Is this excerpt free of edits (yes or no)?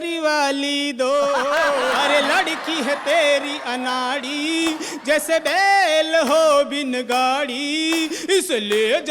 no